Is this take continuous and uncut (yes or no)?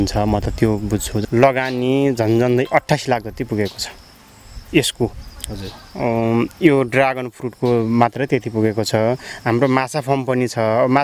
no